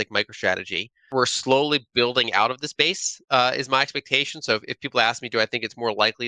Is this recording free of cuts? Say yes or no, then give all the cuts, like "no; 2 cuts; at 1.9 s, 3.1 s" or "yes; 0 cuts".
no; 1 cut; at 1.0 s